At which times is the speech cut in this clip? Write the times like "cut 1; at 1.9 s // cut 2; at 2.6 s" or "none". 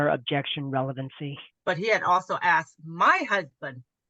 cut 1; at 1.5 s